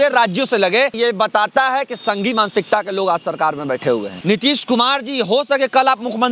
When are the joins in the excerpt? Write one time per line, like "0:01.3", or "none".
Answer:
0:00.9
0:04.1

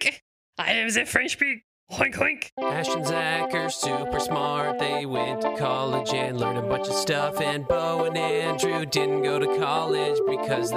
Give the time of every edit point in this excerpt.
0:02.5

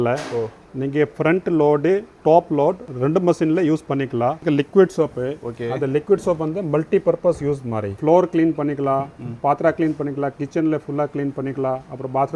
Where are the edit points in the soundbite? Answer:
0:02.9
0:04.4
0:07.9

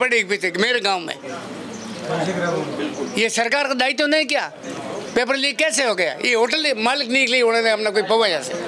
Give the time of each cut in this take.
none

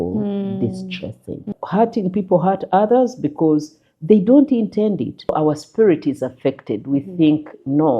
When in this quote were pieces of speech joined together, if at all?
0:01.6
0:05.4

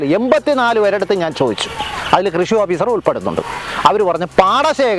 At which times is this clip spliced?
none

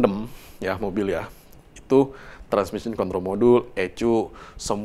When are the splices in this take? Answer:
none

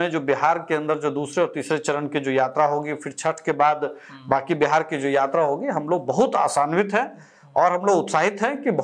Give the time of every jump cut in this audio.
none

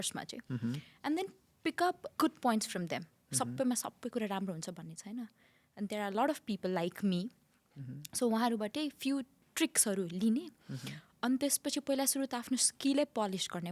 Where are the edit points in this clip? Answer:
0:02.1
0:09.4

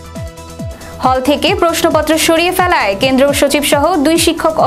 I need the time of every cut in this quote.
0:00.9

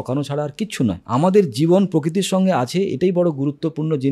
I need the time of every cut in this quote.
0:01.0

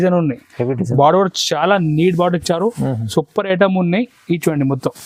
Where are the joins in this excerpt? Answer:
none

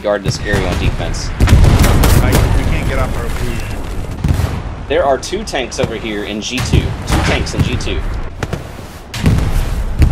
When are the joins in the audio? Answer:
0:04.1
0:08.2

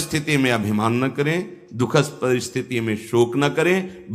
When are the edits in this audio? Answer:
none

